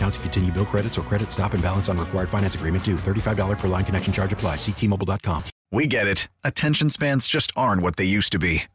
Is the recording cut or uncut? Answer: cut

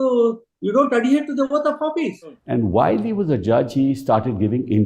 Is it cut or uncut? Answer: cut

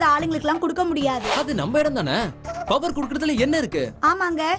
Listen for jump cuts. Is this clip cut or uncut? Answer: cut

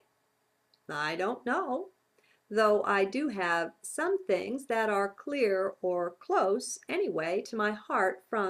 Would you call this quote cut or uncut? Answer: uncut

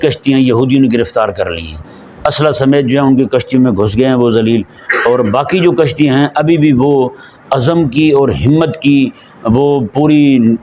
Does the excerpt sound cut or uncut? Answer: uncut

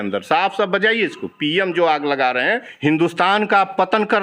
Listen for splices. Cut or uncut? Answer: cut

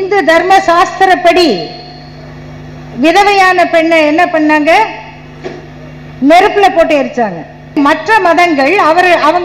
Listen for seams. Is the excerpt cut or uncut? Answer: cut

